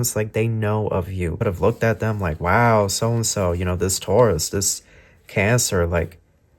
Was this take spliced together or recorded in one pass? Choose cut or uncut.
cut